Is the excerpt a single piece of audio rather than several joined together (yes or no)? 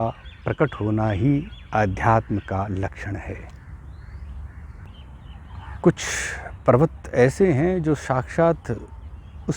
no